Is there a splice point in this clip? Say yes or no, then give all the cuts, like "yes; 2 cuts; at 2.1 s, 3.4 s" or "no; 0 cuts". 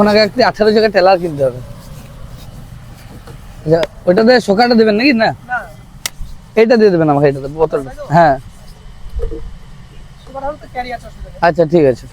no; 0 cuts